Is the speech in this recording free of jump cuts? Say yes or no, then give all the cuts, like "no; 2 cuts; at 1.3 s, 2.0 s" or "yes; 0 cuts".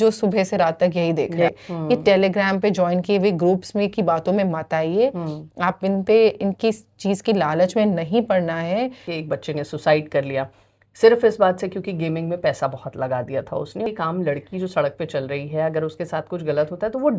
no; 3 cuts; at 1.5 s, 9.1 s, 13.9 s